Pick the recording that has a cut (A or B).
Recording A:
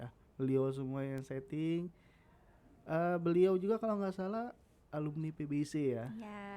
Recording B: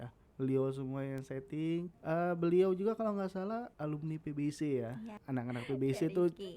B